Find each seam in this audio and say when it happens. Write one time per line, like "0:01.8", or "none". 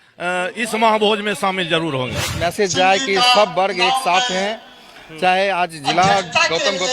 0:02.3

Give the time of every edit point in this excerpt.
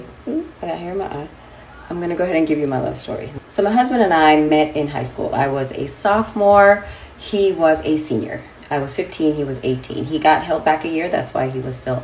none

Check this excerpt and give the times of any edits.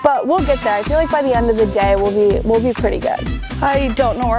0:03.4

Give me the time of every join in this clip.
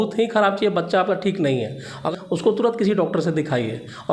0:02.1

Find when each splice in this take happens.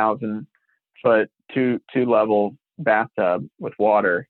none

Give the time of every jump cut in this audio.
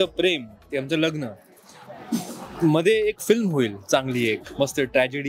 none

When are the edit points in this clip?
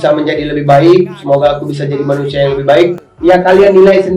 0:02.9

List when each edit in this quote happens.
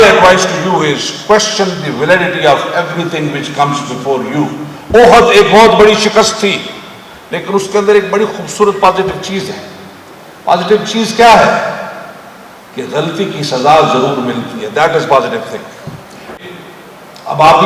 0:16.3

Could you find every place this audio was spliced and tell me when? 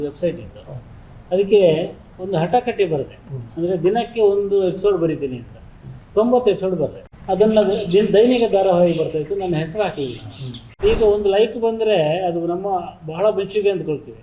0:07.1
0:10.8

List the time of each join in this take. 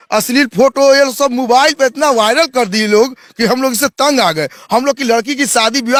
none

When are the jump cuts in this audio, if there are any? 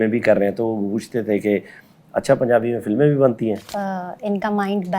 0:03.7

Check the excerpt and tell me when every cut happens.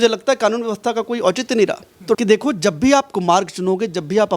0:02.2

